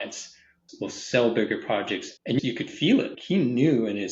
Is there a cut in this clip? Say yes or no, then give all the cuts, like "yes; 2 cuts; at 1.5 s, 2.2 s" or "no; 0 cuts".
yes; 2 cuts; at 2.4 s, 3.2 s